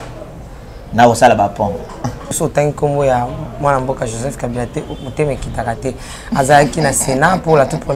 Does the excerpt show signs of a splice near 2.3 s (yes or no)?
yes